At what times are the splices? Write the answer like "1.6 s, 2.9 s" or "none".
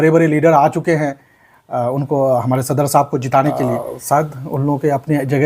3.7 s